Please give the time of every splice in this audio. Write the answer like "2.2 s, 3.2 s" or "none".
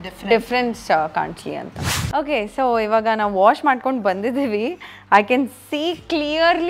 1.9 s